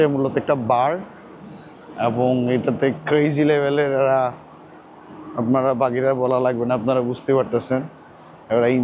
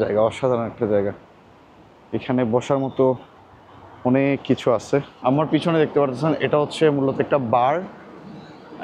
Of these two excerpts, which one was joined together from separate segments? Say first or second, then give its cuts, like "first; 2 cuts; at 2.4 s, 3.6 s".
second; 1 cut; at 5.1 s